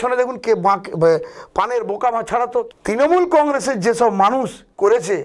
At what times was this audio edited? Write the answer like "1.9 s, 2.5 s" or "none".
2.7 s

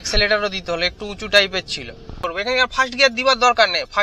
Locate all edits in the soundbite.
2.2 s

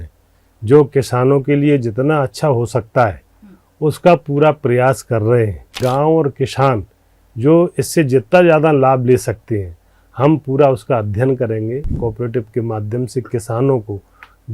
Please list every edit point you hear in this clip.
5.8 s, 11.9 s

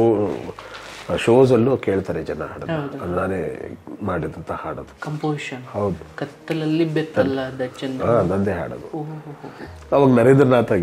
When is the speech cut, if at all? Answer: none

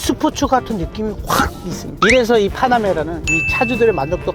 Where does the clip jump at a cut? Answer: 1.8 s

